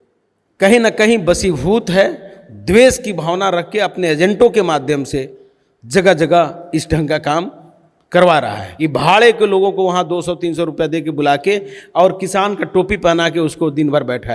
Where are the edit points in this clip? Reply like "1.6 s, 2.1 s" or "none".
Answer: 8.6 s